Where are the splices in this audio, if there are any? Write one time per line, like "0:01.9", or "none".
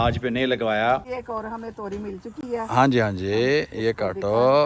0:01.1